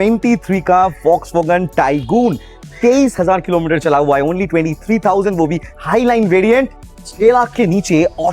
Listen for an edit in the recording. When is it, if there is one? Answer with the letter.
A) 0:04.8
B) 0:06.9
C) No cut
B